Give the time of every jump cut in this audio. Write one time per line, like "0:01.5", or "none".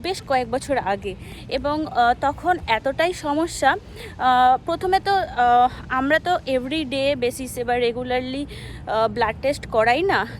none